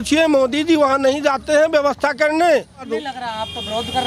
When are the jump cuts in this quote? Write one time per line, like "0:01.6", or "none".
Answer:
0:02.9

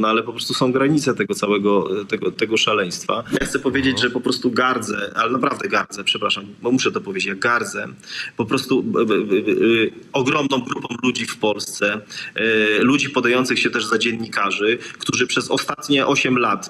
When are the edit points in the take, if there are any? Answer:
0:03.4

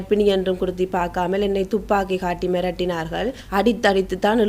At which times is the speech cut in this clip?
0:03.4

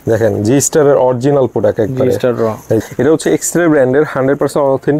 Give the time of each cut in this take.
0:02.8

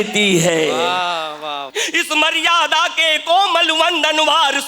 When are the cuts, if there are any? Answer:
0:01.7

